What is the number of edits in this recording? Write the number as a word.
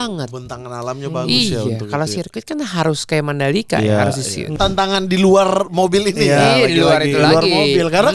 one